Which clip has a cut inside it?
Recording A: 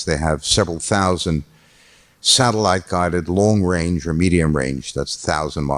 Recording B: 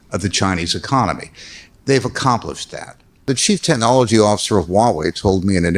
B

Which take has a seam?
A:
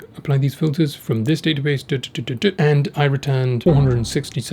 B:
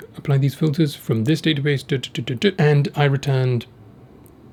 A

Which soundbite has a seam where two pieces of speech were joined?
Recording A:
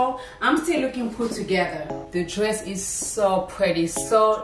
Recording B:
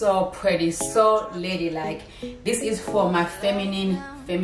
A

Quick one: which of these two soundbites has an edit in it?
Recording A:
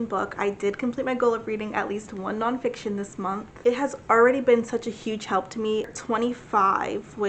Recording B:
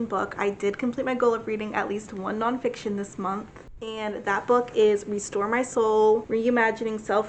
A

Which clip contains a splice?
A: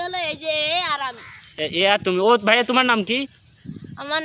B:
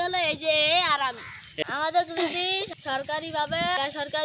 B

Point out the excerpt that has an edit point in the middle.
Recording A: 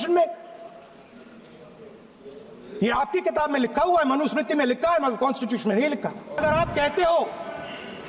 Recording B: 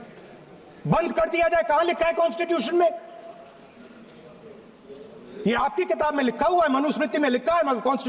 A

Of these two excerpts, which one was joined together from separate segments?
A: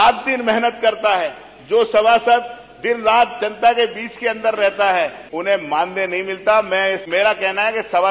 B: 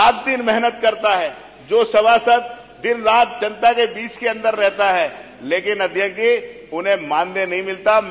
A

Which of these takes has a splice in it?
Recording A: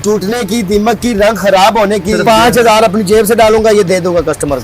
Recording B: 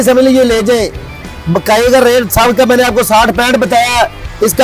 A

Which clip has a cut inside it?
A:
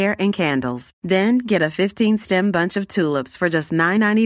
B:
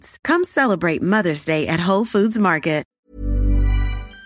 B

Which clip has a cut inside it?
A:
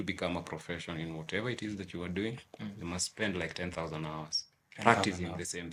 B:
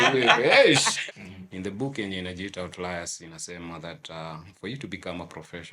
B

